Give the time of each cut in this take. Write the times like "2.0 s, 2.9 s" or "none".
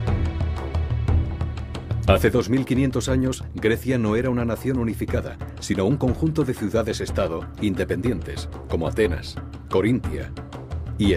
1.3 s